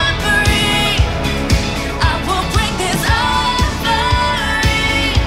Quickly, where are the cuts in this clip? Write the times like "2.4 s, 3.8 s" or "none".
none